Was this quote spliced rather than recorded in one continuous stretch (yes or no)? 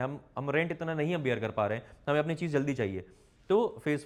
no